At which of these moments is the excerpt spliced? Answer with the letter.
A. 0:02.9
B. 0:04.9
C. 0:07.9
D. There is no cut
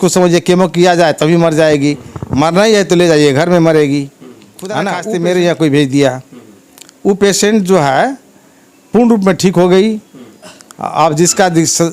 B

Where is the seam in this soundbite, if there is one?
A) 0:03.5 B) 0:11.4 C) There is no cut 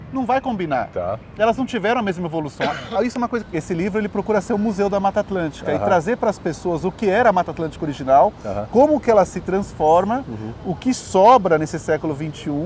A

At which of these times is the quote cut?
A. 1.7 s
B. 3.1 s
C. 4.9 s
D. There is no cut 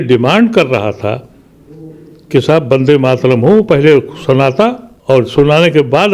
C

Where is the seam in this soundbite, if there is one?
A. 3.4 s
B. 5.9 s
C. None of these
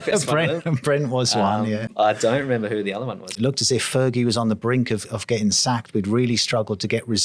A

